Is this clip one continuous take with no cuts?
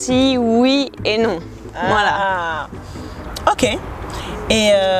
yes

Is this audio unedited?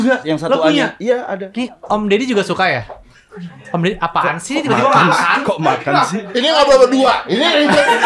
no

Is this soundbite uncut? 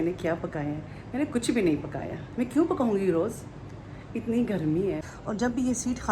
no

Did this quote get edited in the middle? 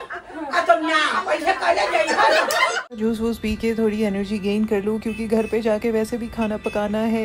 yes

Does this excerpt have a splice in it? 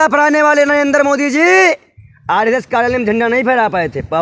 no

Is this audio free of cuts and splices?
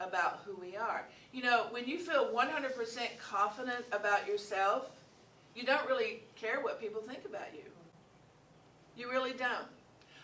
yes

